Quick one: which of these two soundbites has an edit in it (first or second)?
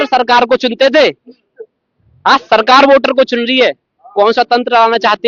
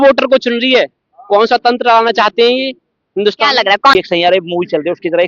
second